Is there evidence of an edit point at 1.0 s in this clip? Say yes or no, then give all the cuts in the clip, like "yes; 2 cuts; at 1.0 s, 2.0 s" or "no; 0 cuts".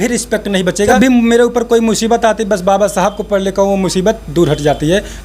yes; 1 cut; at 1.0 s